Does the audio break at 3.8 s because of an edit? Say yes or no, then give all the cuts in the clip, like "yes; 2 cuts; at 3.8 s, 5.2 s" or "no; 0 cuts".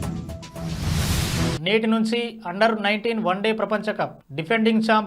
no; 1 cut; at 1.5 s